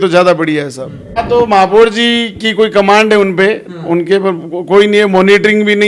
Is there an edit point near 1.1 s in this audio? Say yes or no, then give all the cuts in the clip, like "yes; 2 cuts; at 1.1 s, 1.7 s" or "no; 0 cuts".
yes; 1 cut; at 1.1 s